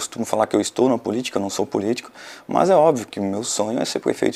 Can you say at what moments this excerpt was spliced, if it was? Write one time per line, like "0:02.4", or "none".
none